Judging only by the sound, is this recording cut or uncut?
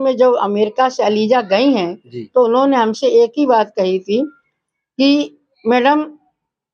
uncut